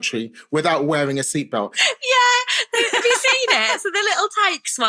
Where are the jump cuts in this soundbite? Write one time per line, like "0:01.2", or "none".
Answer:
0:01.8